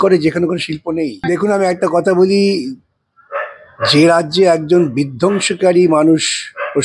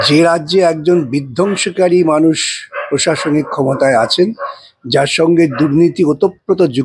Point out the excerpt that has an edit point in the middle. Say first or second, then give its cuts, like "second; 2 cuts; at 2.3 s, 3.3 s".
first; 1 cut; at 1.2 s